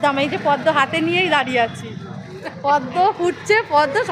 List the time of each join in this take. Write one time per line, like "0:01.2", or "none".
none